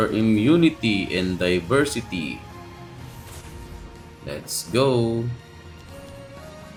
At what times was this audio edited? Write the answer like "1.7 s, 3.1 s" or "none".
none